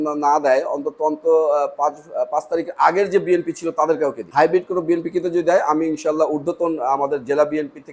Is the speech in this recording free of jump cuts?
no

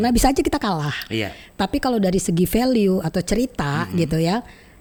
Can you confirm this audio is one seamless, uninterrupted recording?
yes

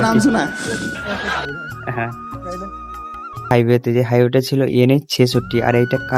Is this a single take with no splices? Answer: no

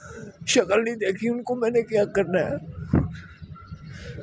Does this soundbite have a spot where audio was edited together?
no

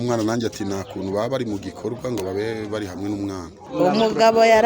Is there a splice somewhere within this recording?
yes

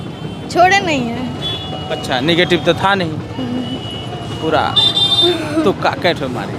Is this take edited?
no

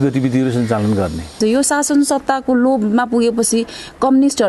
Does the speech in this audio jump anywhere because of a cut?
yes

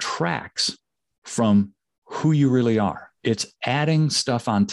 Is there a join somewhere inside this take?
yes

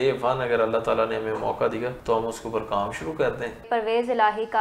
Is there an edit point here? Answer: yes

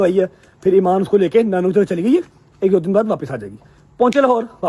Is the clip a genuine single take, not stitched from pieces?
yes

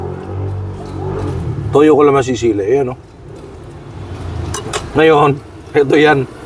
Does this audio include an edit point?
no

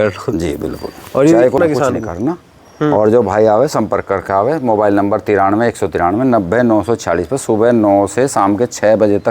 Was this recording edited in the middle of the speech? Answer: yes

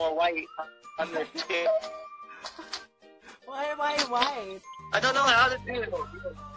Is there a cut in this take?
no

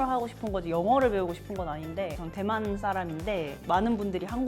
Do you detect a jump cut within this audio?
yes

